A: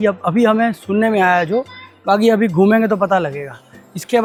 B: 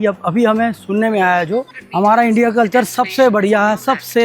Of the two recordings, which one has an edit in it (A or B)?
B